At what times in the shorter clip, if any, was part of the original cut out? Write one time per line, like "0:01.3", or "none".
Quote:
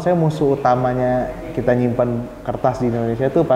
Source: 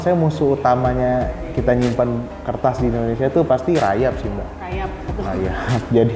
none